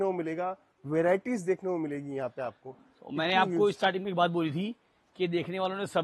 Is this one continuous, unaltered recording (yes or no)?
yes